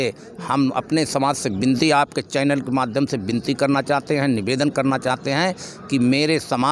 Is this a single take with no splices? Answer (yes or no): yes